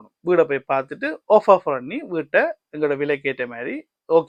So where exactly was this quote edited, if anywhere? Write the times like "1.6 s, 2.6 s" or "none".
none